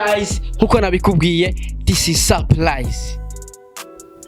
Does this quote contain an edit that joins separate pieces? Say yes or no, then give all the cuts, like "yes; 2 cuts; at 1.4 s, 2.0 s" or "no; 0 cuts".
no; 0 cuts